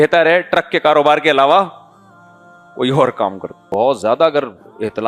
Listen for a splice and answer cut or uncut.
cut